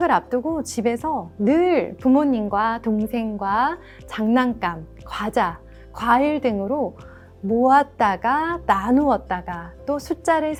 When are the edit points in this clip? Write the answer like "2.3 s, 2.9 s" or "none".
none